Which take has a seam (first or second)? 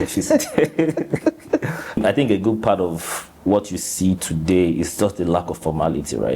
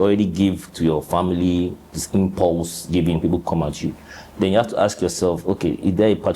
first